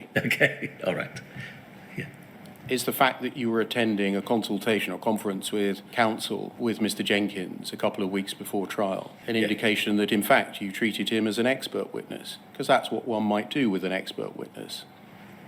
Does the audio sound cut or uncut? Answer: uncut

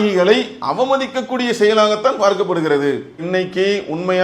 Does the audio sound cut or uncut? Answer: uncut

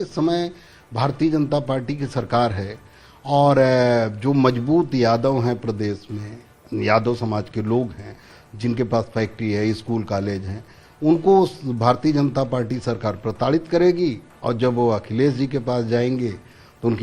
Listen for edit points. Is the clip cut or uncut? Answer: uncut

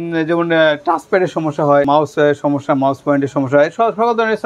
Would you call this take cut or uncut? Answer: cut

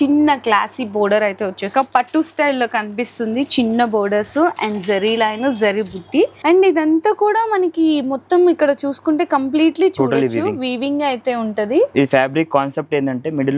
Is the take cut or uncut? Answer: cut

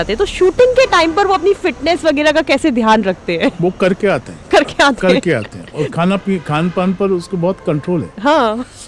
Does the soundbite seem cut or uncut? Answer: uncut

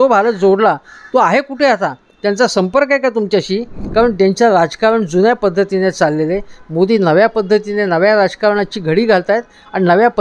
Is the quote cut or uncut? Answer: cut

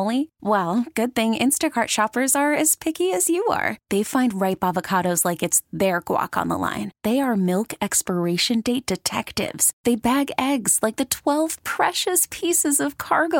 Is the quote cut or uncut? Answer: uncut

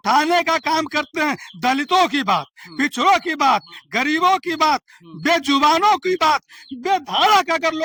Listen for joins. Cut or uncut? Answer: uncut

